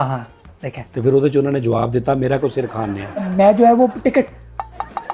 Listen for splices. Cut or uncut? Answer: cut